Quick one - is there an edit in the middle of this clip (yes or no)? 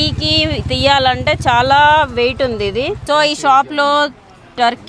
yes